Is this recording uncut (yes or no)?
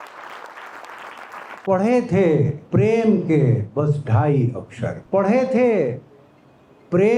no